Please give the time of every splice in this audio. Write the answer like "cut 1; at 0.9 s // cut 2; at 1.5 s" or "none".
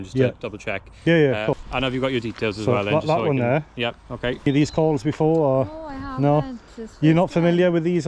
cut 1; at 1.6 s // cut 2; at 4.5 s